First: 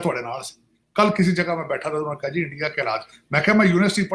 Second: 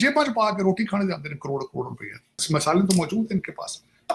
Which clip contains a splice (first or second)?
second